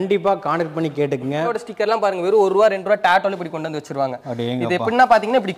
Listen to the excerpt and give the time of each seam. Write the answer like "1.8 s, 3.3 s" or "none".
1.5 s